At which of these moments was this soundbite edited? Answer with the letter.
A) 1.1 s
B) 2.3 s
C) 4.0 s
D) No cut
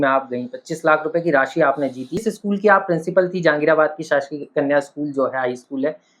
B